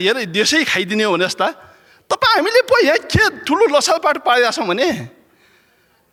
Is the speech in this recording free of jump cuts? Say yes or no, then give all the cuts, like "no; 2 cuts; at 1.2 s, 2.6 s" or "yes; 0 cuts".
yes; 0 cuts